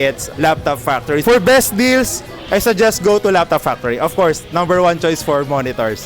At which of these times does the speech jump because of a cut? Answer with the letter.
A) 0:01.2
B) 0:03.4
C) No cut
A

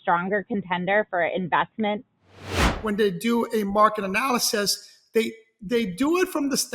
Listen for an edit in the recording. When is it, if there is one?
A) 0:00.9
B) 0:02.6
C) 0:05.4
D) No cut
B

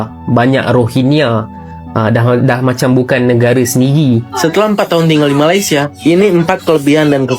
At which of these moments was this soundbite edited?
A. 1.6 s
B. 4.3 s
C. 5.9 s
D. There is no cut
B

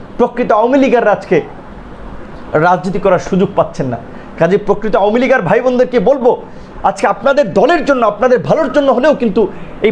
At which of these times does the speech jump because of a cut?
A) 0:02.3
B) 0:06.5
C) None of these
C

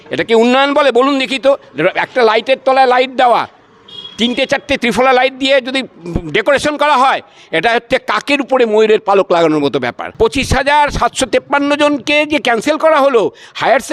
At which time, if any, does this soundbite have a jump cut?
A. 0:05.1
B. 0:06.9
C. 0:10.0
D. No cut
C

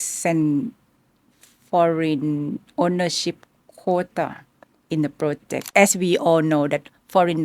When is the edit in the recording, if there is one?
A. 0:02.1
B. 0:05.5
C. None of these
B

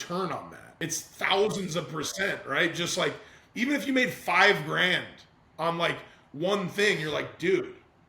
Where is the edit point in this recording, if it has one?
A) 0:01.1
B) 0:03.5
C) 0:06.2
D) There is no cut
A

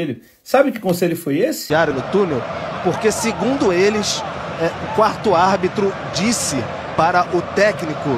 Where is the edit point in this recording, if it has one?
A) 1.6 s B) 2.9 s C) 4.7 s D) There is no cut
A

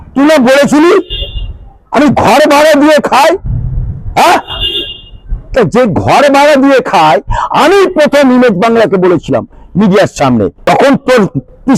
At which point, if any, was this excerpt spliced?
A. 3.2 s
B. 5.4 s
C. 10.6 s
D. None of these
C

